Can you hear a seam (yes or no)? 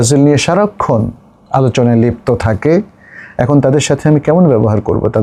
no